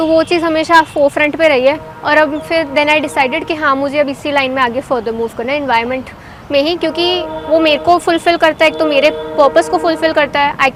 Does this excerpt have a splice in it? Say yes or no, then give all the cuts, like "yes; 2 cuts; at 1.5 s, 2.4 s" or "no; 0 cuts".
no; 0 cuts